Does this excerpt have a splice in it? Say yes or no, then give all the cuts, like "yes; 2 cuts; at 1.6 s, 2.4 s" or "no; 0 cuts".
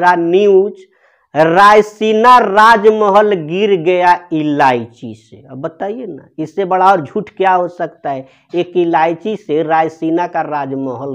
no; 0 cuts